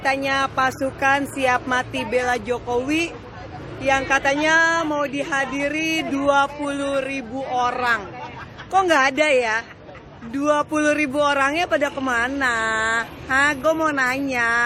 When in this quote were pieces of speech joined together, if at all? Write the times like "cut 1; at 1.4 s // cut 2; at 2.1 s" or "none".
none